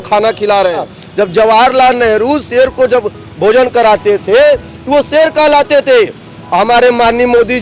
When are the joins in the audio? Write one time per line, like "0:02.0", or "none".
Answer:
0:01.0

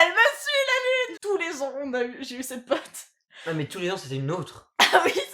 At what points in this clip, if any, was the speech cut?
0:01.1

